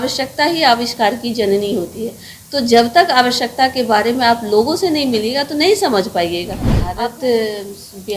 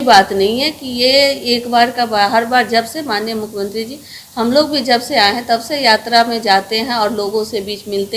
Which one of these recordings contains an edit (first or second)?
first